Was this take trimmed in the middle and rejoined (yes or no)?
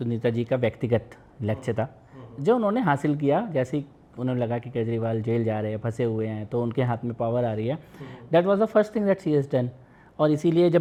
no